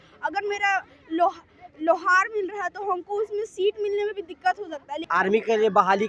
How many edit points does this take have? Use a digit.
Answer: 1